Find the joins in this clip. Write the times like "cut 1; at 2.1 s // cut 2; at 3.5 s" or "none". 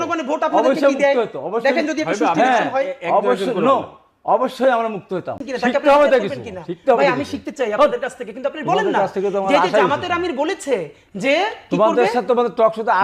cut 1; at 5.4 s